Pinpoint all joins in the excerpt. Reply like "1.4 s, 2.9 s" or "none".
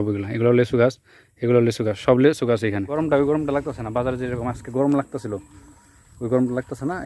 3.0 s